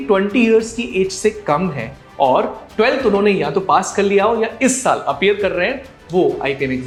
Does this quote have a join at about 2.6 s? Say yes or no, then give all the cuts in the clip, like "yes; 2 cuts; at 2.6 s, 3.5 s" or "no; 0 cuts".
no; 0 cuts